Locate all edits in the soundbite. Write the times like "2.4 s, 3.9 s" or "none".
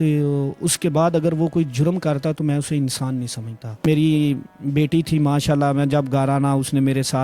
3.9 s